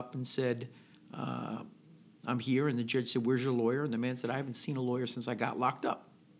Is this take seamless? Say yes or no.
yes